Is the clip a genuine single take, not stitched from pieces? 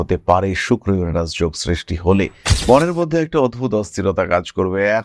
no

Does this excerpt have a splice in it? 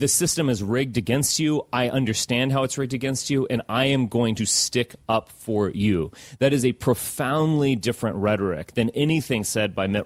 no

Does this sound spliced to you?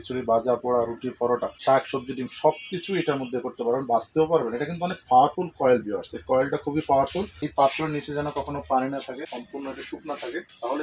yes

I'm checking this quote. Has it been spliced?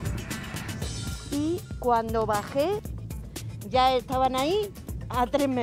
yes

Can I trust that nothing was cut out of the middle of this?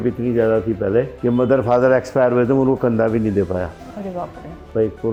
yes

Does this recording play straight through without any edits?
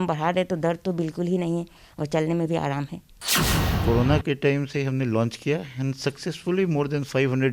no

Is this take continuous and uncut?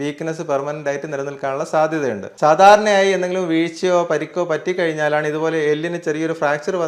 no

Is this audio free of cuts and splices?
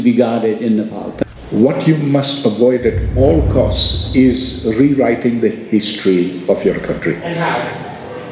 no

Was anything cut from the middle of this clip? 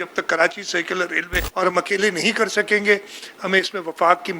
yes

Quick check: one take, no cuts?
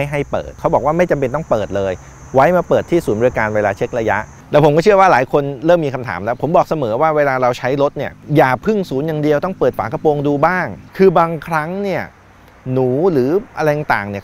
yes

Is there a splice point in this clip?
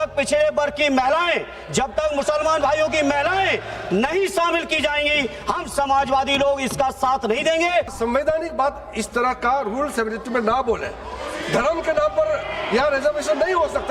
yes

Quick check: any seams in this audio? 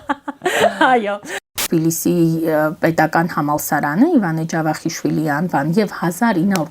yes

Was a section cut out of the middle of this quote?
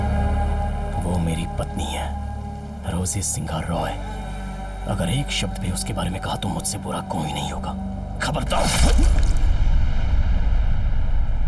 no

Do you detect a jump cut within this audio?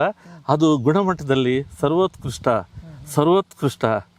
no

